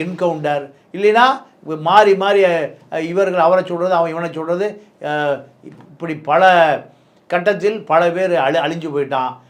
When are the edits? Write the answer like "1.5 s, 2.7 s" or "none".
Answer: none